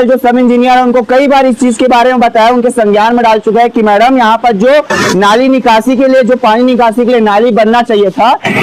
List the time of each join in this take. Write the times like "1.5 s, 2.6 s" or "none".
none